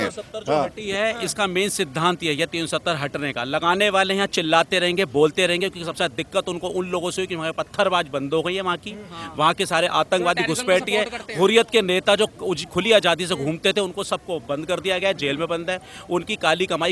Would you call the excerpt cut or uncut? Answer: uncut